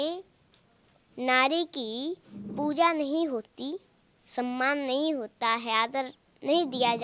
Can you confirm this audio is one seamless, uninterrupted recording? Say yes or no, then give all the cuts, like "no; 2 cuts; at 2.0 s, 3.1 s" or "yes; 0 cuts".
yes; 0 cuts